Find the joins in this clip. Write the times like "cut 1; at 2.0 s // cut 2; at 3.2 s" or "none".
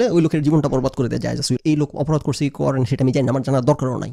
cut 1; at 1.6 s